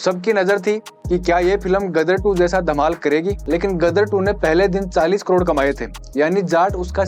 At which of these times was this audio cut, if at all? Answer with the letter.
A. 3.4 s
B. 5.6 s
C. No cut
A